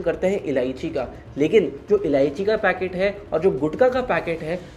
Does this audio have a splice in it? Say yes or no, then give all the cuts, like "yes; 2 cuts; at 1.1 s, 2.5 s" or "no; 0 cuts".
no; 0 cuts